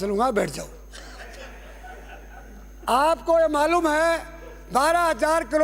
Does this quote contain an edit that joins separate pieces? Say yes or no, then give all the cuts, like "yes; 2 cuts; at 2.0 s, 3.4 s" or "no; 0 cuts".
no; 0 cuts